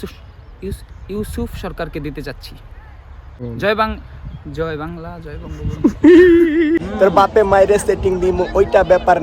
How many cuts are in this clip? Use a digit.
2